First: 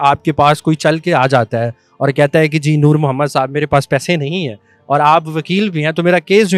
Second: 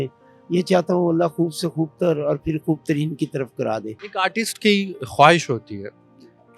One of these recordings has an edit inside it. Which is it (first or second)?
second